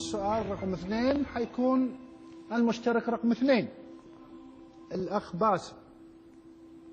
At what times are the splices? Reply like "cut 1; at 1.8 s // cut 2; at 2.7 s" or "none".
none